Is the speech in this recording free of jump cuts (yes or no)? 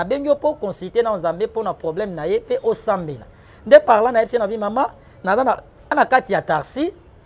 no